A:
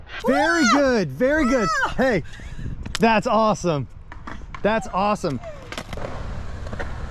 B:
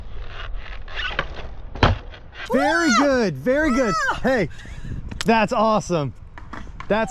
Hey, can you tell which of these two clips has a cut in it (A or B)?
A